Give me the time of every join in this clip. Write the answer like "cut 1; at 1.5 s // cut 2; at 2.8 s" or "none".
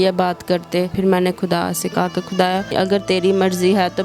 cut 1; at 0.9 s // cut 2; at 2.7 s